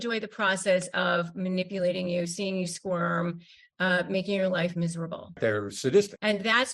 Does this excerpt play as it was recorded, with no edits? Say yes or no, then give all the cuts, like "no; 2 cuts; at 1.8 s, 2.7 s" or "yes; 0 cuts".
yes; 0 cuts